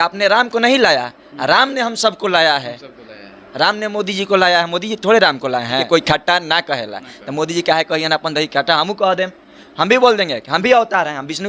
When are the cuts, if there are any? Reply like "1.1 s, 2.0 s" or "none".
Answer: 5.8 s